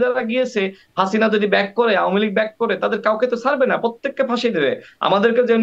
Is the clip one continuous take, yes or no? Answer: yes